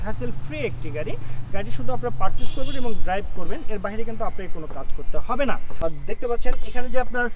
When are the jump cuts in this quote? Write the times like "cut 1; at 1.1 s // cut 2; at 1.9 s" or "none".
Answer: cut 1; at 5.8 s